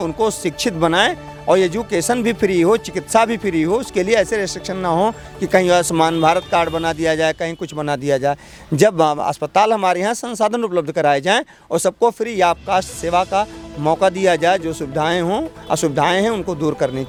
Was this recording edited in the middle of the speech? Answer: no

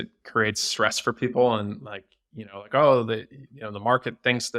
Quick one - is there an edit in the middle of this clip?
no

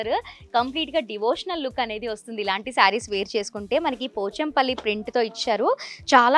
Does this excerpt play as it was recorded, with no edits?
yes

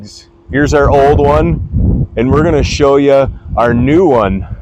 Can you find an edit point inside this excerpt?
no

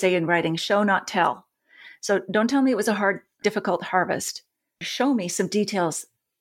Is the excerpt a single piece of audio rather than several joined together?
yes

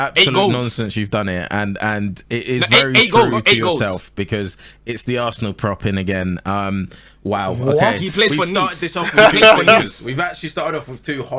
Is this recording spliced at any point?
no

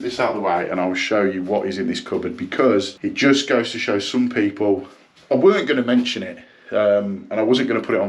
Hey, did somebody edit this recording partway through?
no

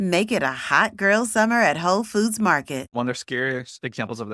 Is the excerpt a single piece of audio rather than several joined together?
no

